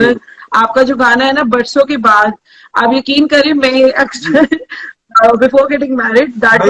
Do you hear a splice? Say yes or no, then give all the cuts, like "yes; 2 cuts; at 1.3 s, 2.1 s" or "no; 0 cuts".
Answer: no; 0 cuts